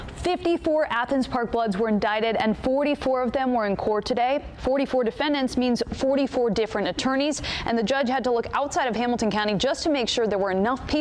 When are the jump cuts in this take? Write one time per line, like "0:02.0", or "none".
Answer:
none